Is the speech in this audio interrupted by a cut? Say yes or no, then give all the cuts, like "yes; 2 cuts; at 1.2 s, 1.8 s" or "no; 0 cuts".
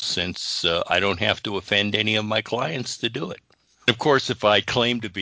yes; 1 cut; at 3.9 s